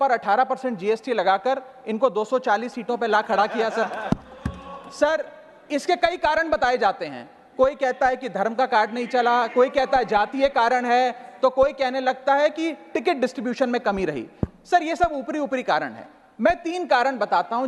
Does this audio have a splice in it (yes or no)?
no